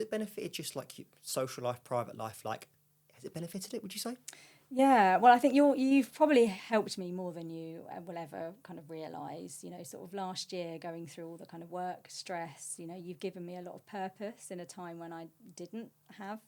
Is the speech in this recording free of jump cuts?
yes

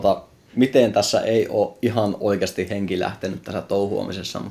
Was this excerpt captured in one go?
yes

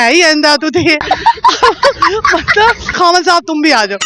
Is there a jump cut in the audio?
yes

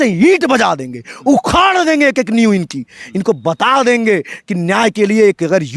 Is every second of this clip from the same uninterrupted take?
yes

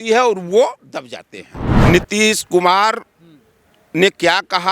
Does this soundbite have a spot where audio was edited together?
yes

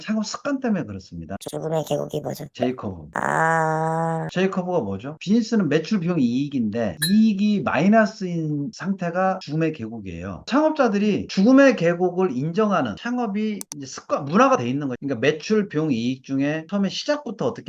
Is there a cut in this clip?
no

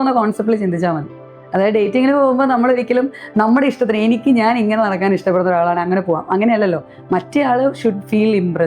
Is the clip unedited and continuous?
yes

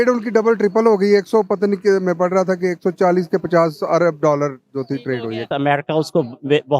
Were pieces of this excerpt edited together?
yes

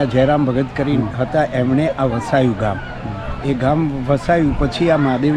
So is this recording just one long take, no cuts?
yes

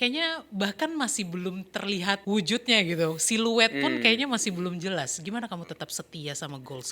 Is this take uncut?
no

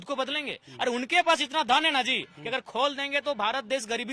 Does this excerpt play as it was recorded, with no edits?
yes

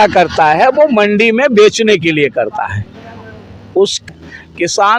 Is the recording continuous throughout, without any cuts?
no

